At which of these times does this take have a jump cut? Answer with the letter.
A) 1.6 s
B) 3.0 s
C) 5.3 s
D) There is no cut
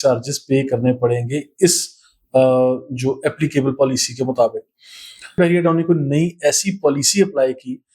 C